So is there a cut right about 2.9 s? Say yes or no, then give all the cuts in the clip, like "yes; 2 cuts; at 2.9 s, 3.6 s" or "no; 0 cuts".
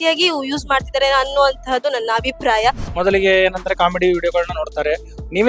yes; 1 cut; at 2.9 s